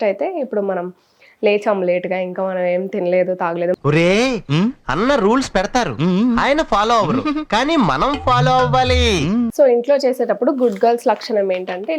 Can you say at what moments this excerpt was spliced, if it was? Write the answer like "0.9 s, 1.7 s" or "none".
9.5 s